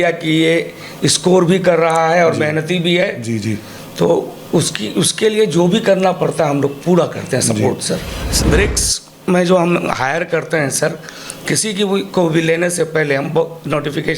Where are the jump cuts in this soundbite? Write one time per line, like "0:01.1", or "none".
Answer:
0:08.2